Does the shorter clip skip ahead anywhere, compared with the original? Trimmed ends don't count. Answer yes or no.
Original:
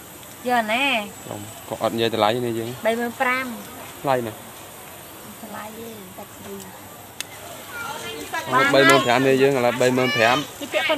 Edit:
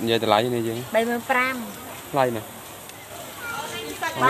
yes